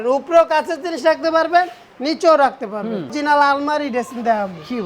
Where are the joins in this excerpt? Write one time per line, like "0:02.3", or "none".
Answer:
0:03.1